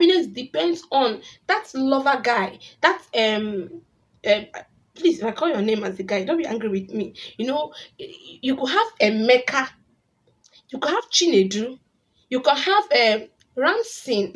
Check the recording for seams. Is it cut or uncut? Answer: uncut